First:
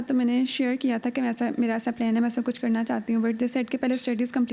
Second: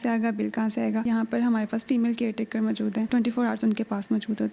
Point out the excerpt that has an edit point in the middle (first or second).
second